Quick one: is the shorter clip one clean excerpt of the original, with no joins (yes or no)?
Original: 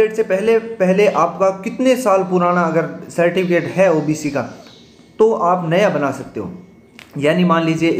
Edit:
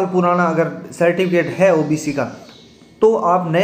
yes